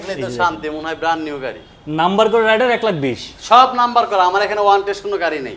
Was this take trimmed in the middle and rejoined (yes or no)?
no